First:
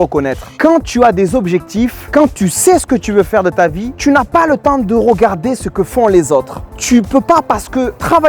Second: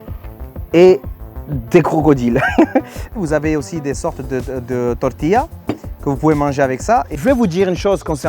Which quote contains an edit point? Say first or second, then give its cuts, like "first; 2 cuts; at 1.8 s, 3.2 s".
second; 2 cuts; at 3.2 s, 7.1 s